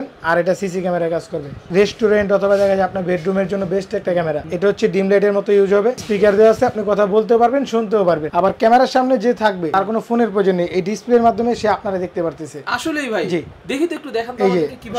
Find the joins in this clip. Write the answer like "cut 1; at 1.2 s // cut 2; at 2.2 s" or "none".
cut 1; at 1.7 s // cut 2; at 4.5 s // cut 3; at 6.0 s // cut 4; at 8.3 s // cut 5; at 9.6 s